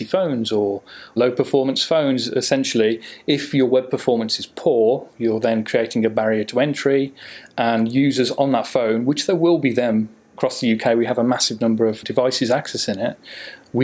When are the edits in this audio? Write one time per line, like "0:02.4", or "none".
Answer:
none